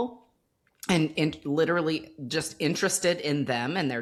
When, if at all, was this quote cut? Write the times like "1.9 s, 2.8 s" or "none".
none